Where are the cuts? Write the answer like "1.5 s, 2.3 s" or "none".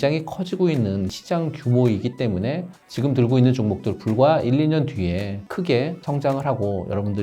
1.1 s